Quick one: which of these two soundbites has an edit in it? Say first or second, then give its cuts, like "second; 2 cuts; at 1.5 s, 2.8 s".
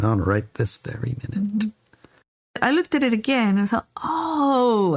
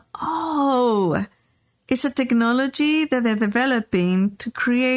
first; 1 cut; at 2.6 s